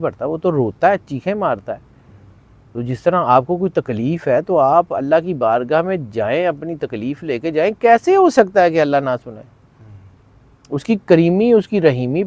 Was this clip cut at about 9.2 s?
no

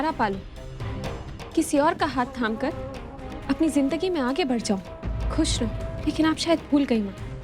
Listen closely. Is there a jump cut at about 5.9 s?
yes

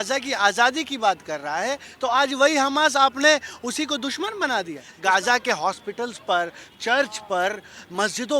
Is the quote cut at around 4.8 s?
yes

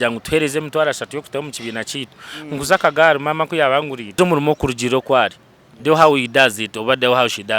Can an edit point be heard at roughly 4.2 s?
yes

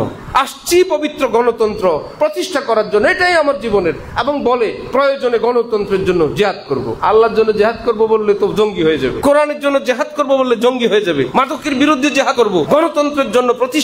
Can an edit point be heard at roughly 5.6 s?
no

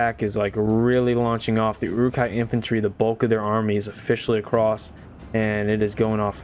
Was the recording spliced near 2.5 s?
no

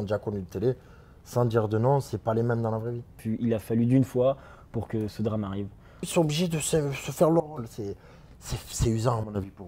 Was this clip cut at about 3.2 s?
yes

